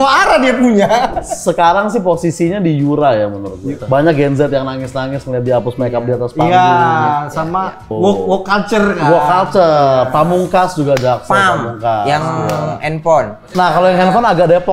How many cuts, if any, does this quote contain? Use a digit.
4